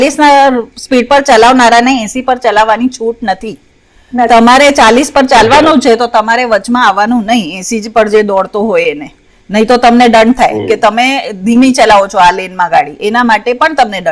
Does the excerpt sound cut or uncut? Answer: uncut